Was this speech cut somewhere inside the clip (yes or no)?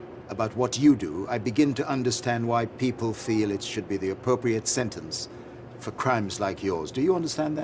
no